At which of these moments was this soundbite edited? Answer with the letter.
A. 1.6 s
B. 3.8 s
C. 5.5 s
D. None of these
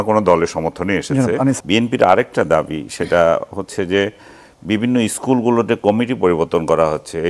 A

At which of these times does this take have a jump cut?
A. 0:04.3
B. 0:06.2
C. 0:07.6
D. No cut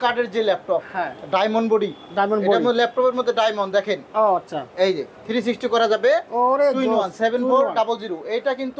D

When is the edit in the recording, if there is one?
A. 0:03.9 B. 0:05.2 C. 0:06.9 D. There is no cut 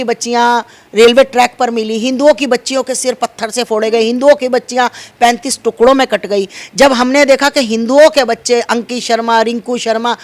D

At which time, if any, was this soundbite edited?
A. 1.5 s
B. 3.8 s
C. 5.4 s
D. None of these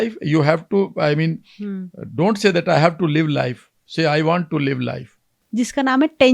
C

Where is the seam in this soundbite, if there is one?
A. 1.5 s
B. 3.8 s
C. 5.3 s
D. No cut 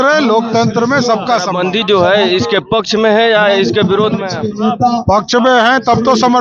A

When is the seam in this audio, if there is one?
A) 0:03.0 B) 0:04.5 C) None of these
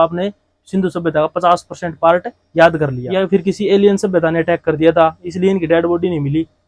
A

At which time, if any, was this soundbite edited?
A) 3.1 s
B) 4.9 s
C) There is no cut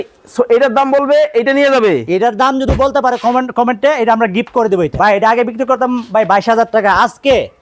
B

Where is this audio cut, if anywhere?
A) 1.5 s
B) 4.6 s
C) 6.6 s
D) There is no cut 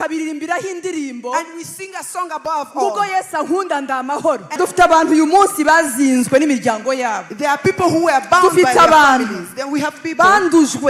B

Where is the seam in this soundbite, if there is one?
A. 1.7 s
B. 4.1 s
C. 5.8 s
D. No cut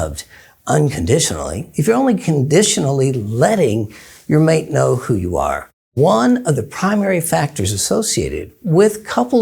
C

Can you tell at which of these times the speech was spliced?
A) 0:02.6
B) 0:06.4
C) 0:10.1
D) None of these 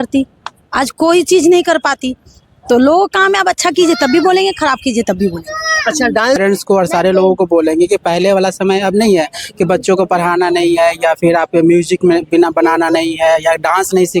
B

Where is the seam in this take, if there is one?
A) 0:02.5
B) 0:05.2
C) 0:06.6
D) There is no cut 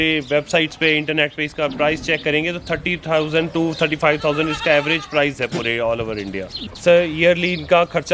C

